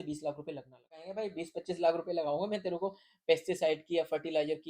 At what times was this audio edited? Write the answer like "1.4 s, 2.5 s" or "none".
1.1 s